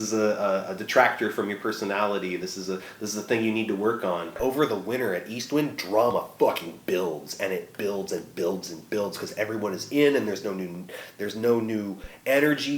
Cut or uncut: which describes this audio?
cut